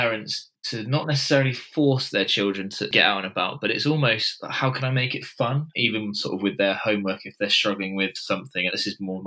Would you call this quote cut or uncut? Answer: cut